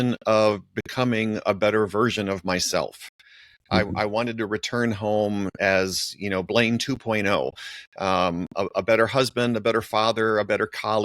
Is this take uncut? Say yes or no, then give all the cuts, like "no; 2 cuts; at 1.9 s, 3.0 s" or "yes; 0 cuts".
yes; 0 cuts